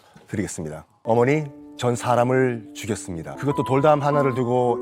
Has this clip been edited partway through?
yes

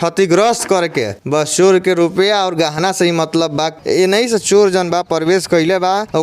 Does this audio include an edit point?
yes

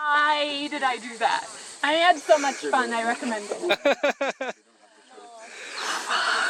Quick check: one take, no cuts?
yes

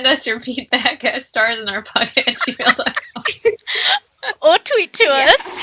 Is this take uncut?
yes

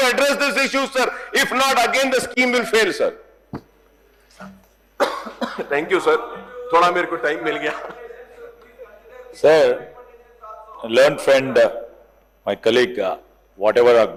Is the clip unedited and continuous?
yes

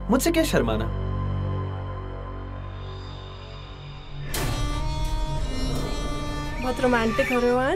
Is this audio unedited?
yes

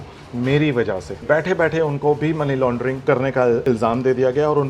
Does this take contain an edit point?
yes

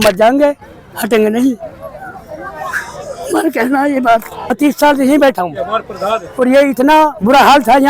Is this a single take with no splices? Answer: no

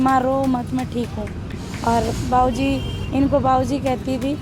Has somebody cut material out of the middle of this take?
no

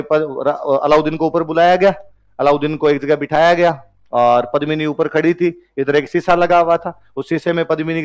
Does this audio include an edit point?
no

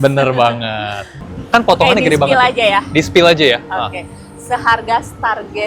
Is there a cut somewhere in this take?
yes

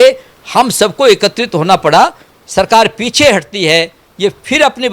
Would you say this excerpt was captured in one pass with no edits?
no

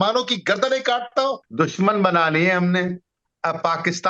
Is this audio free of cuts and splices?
no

